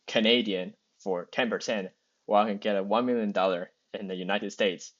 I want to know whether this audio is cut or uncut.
uncut